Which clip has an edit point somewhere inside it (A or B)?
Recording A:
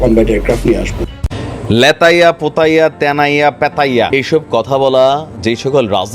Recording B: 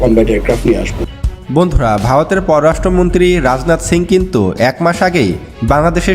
A